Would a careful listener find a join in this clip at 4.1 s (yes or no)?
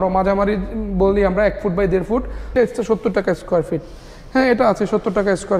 no